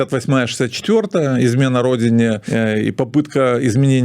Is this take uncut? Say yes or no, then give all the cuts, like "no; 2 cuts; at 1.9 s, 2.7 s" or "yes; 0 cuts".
no; 1 cut; at 2.4 s